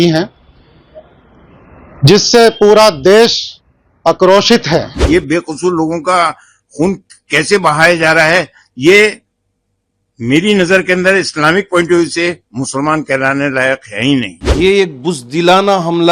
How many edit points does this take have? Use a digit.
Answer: 2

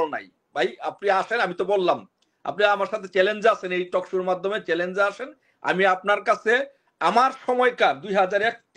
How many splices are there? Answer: 0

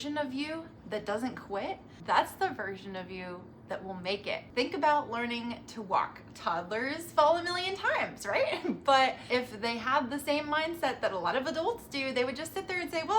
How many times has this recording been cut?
3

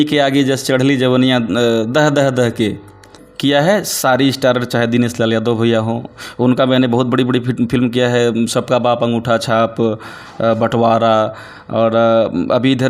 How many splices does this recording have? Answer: 1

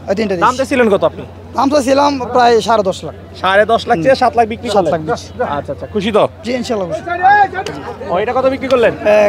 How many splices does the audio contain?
0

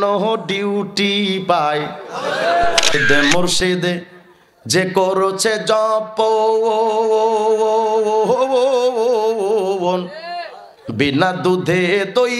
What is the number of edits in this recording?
1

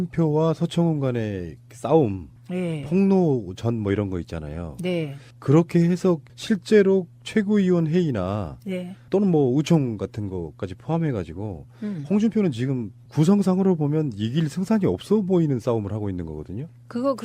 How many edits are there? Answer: 1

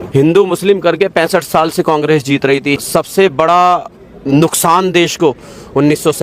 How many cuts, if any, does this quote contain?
1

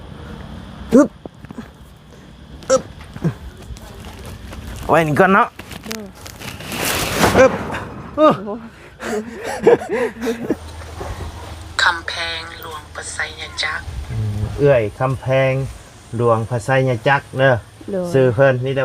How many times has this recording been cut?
1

